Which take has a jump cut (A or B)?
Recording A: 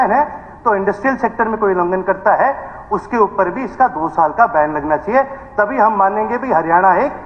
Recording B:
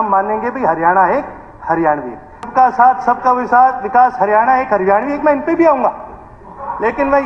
B